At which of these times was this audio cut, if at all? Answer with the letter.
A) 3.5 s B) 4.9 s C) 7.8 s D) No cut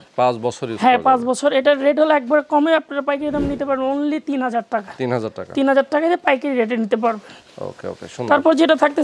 D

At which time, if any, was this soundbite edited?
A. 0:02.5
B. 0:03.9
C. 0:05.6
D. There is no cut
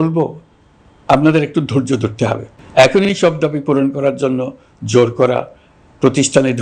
A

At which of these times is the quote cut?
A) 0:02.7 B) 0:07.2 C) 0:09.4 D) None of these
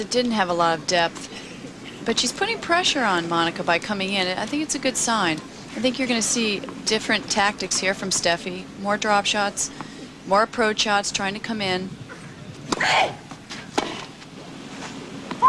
D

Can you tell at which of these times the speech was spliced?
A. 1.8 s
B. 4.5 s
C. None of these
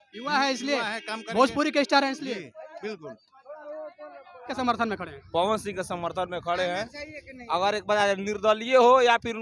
B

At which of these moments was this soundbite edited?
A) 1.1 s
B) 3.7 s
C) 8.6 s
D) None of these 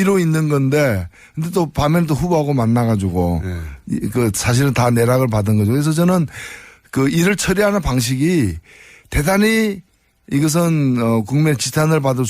A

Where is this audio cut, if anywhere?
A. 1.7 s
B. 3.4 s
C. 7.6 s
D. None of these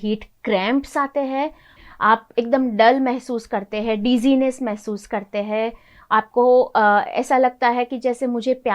A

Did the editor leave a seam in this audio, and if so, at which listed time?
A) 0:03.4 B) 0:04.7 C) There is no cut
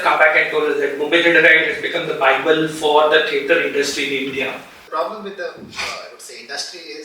B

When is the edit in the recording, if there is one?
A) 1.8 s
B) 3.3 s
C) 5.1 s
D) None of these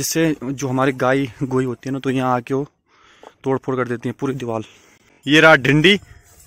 C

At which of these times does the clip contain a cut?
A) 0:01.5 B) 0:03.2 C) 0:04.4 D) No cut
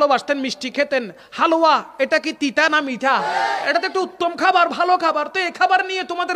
B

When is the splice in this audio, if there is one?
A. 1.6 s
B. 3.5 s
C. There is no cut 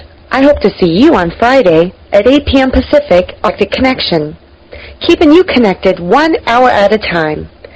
B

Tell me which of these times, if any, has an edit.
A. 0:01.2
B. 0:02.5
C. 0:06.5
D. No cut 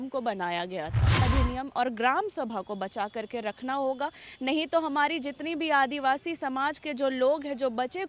A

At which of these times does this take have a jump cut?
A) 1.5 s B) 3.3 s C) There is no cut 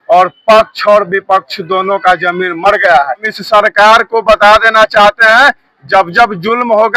B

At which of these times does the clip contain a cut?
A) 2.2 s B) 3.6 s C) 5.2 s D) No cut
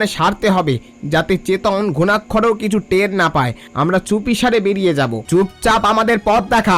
C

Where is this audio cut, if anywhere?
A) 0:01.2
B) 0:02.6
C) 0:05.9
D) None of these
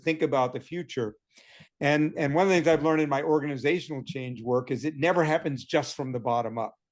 D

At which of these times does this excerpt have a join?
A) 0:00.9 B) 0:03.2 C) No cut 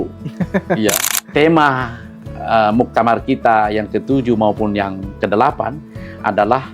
A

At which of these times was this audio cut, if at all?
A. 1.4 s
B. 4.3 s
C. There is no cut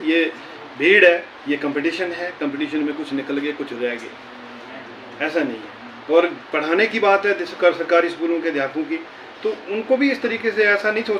C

